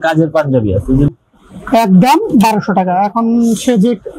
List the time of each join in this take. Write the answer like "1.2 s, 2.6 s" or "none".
1.1 s